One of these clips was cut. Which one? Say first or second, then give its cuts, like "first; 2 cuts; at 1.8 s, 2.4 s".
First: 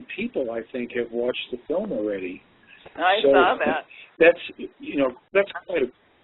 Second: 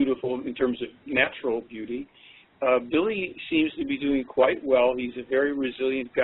first; 1 cut; at 2.0 s